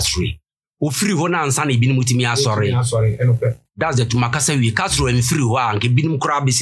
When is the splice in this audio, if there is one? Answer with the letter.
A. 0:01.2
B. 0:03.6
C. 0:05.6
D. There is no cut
B